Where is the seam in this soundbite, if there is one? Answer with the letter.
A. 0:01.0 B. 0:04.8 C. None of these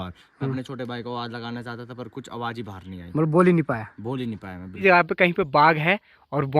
B